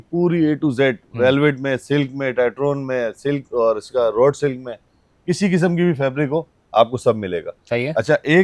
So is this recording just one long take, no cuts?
yes; 0 cuts

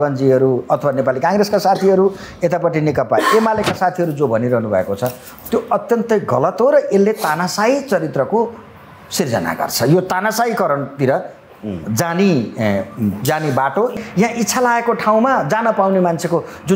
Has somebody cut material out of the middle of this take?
yes; 1 cut; at 13.9 s

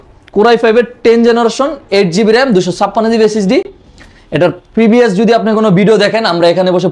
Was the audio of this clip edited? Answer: no; 0 cuts

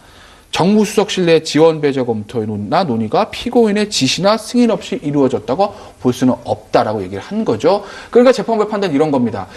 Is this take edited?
yes; 1 cut; at 3.3 s

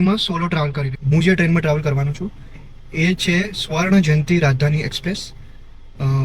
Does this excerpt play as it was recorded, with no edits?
no; 1 cut; at 0.9 s

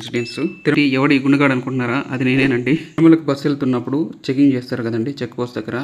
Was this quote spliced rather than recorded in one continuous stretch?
yes; 2 cuts; at 0.8 s, 3.0 s

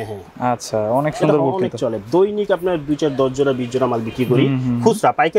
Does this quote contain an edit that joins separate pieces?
no; 0 cuts

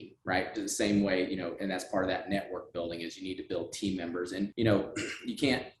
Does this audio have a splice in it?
yes; 1 cut; at 4.5 s

